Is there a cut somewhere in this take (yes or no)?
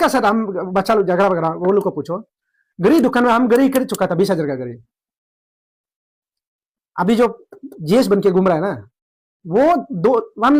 no